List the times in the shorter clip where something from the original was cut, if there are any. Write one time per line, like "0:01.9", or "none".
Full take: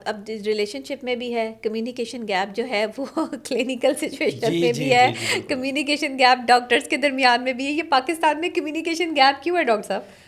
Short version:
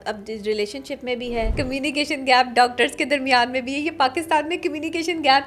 0:01.5